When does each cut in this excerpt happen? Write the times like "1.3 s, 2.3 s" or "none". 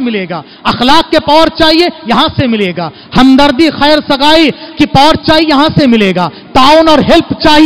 none

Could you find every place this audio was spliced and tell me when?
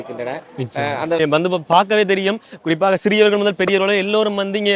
1.2 s

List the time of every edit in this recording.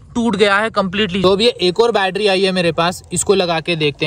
1.2 s

